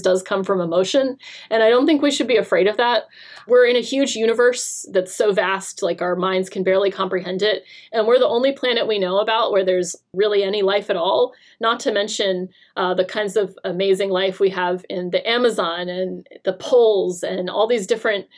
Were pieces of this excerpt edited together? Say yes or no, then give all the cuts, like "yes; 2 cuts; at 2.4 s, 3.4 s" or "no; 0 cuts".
yes; 2 cuts; at 3.4 s, 10.0 s